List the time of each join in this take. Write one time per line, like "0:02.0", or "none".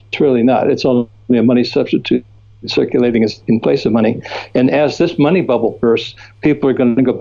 none

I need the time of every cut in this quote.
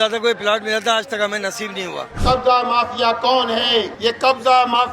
0:02.1

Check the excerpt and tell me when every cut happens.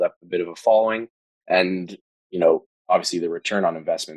0:01.5

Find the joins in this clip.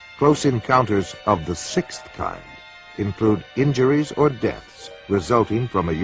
0:03.0

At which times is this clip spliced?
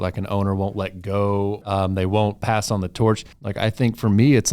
0:01.7
0:03.4

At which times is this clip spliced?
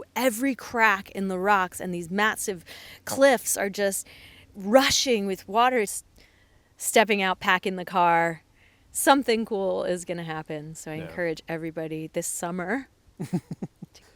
0:06.0

